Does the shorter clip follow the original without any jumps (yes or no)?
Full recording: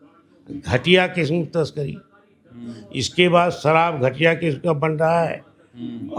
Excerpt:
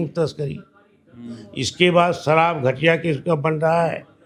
yes